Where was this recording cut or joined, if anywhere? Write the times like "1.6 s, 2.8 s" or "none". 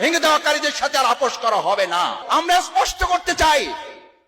2.2 s